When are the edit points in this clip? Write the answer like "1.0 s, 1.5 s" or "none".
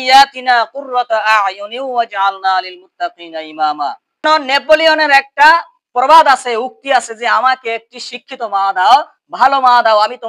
4.2 s